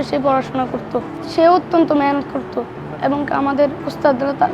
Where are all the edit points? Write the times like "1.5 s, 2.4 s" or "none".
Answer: 1.2 s